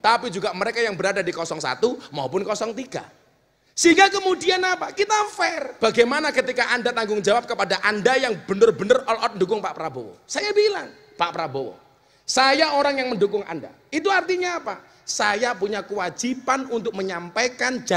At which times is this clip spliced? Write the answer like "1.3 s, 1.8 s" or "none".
5.7 s